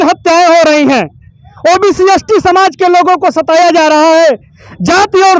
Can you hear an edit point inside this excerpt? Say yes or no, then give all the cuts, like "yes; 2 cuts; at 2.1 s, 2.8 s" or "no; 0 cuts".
no; 0 cuts